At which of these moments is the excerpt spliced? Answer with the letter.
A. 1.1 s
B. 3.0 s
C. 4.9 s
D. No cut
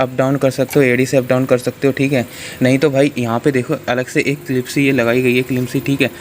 D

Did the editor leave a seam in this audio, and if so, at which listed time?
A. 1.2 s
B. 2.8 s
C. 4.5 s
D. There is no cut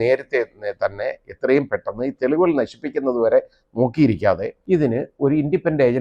C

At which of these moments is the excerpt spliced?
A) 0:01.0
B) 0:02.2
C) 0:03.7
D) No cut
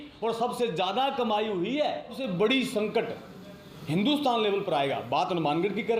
B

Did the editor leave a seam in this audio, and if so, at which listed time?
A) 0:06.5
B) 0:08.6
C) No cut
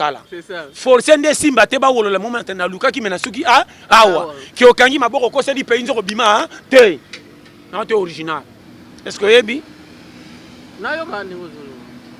B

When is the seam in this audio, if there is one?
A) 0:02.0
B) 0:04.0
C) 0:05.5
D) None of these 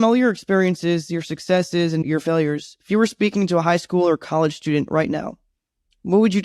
A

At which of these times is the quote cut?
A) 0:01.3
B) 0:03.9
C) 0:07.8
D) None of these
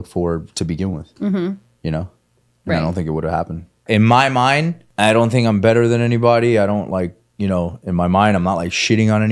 B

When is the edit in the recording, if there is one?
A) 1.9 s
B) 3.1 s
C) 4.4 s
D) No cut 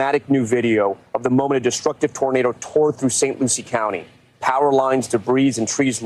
D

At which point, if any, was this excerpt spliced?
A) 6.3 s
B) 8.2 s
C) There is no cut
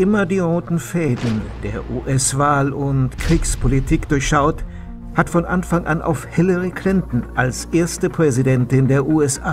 C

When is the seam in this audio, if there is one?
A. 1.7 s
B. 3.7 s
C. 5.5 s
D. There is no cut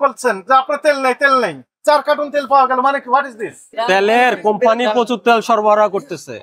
B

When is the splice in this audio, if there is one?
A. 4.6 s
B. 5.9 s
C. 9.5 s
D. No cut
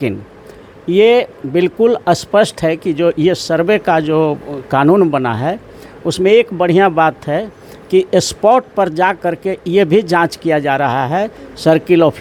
D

